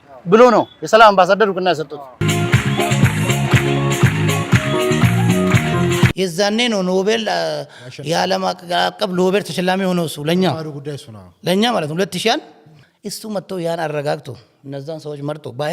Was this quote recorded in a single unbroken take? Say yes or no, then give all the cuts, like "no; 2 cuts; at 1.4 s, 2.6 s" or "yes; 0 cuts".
no; 2 cuts; at 2.2 s, 6.1 s